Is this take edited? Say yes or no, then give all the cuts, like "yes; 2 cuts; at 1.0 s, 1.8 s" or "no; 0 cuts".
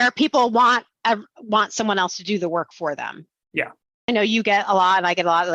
yes; 1 cut; at 4.1 s